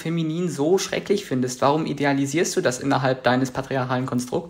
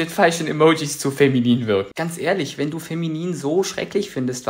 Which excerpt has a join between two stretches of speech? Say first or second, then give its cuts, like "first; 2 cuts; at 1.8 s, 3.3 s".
second; 1 cut; at 1.9 s